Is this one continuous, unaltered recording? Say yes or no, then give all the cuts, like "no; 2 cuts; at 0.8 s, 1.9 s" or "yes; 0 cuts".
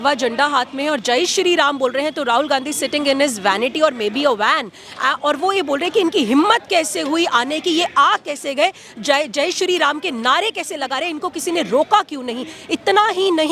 yes; 0 cuts